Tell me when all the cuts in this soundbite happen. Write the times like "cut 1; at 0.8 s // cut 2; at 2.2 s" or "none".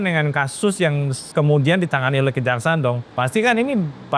cut 1; at 1.2 s // cut 2; at 3.1 s